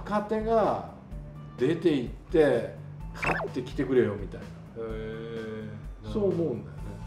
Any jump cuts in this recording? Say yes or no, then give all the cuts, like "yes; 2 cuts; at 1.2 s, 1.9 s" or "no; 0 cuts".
no; 0 cuts